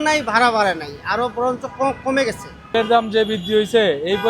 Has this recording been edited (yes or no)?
yes